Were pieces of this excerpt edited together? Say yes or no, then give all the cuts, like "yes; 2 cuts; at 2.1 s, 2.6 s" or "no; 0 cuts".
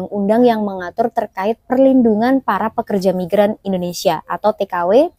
no; 0 cuts